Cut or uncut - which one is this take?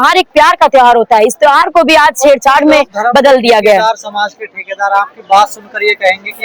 uncut